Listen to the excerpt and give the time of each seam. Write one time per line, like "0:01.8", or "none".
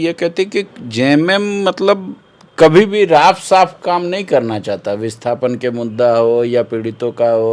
none